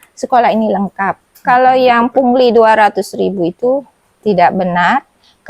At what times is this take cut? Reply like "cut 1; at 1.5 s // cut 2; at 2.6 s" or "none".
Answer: cut 1; at 1.2 s